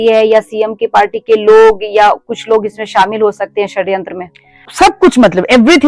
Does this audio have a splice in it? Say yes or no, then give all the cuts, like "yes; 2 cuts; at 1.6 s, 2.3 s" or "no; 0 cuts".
yes; 1 cut; at 4.7 s